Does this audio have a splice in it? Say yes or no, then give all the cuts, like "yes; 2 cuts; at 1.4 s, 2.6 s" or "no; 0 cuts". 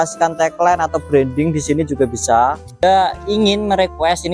yes; 1 cut; at 2.8 s